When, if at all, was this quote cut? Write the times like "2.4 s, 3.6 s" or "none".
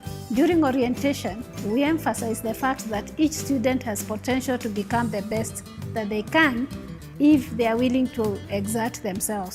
none